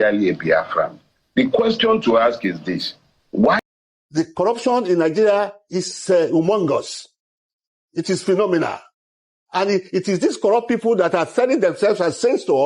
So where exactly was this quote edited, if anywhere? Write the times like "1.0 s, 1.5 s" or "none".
3.6 s